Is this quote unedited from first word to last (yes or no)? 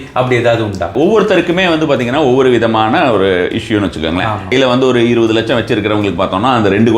no